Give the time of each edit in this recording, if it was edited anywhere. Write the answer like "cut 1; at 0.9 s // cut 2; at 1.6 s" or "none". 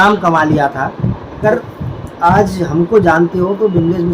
cut 1; at 1.4 s